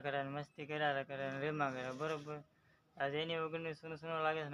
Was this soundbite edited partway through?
no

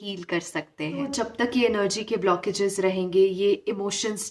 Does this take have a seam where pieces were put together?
yes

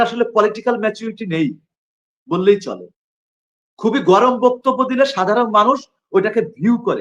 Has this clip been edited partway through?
no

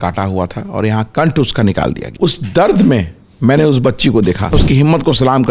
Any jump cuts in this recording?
yes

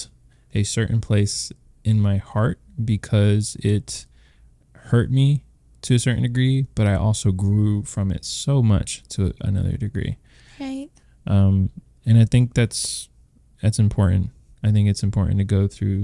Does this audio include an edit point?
no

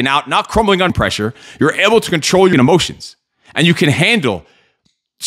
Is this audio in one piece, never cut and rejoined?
no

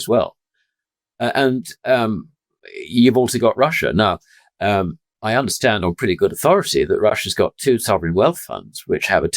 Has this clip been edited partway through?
yes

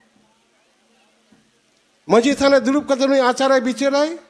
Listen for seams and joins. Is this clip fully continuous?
yes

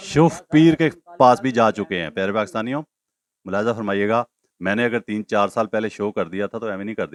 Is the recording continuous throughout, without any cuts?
yes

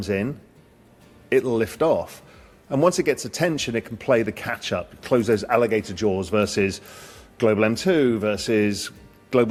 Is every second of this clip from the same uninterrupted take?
yes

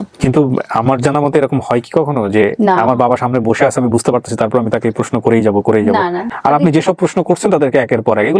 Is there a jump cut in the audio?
yes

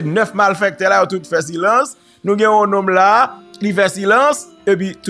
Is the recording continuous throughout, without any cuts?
yes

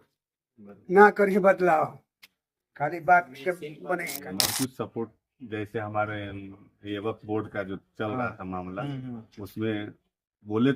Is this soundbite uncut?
no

